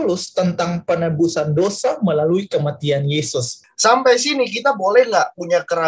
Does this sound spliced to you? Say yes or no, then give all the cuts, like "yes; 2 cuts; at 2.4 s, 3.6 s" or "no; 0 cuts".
yes; 1 cut; at 3.6 s